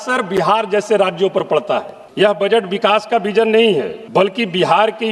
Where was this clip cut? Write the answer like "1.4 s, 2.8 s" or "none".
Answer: 2.0 s, 4.0 s